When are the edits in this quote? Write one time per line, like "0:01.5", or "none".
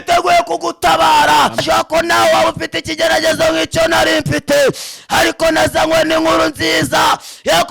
0:01.6